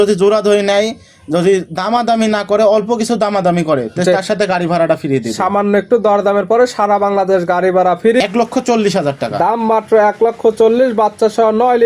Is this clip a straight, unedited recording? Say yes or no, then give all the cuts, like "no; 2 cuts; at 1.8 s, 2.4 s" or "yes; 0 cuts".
no; 1 cut; at 8.2 s